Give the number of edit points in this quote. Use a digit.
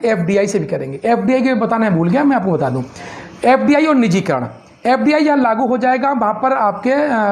0